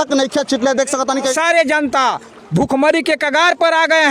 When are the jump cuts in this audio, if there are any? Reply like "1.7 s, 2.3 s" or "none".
1.3 s